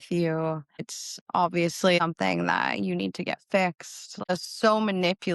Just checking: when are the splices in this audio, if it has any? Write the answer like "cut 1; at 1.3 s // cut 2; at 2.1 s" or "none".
cut 1; at 2.0 s // cut 2; at 4.3 s

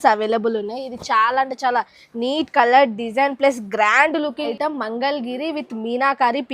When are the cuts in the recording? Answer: cut 1; at 4.5 s

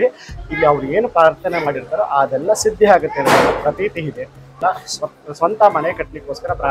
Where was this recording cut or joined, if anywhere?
cut 1; at 4.6 s

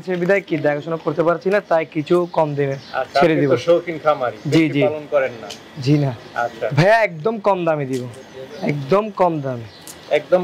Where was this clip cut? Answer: cut 1; at 6.7 s

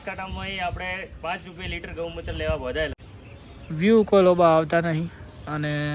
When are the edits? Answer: cut 1; at 3.0 s

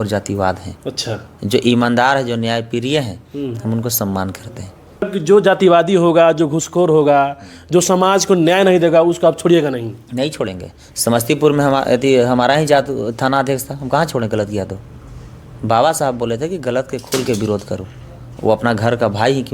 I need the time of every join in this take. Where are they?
cut 1; at 5.1 s

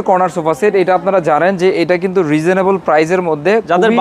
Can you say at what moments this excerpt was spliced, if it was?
none

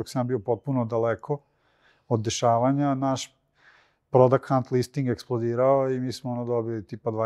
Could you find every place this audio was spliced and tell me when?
none

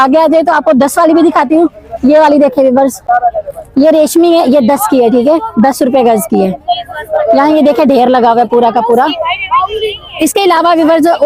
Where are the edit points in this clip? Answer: none

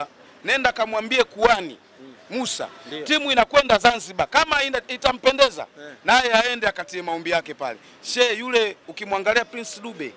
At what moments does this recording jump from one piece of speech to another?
none

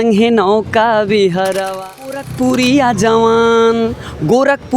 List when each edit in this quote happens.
cut 1; at 2.3 s

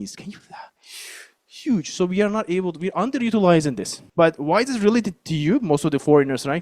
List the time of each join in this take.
cut 1; at 3.9 s

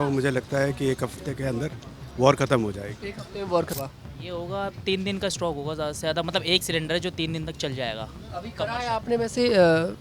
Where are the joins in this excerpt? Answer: cut 1; at 3.7 s

